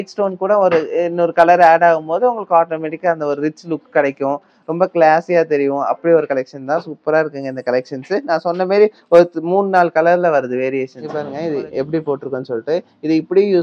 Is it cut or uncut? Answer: cut